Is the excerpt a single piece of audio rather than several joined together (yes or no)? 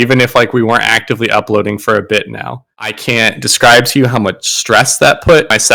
no